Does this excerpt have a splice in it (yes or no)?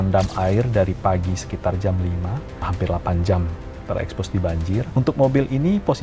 yes